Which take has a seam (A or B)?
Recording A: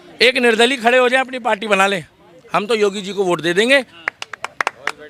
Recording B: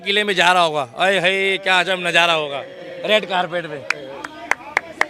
A